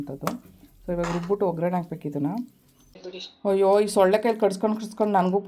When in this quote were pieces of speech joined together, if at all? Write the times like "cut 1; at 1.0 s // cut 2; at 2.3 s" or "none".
cut 1; at 3.0 s